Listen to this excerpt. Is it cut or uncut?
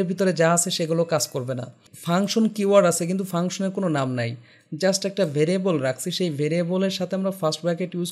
cut